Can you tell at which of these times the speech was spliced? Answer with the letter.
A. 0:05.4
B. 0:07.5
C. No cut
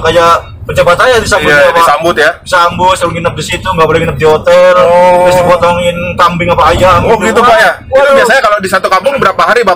C